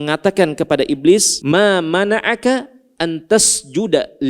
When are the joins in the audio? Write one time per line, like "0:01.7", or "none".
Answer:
0:01.3